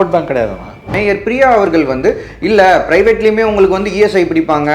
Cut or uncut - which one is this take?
cut